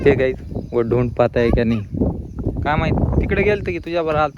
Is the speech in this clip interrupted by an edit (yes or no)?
no